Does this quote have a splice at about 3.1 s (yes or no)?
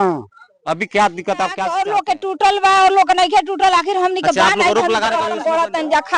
no